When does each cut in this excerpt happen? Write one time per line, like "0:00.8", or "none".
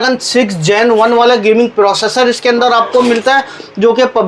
none